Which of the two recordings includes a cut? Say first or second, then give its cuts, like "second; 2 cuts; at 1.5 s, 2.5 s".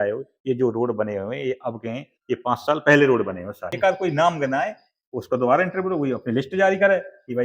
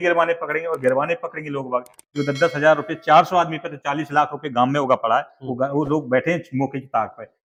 first; 1 cut; at 3.6 s